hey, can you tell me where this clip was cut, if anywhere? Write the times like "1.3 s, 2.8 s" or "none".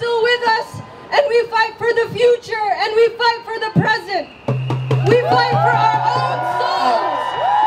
none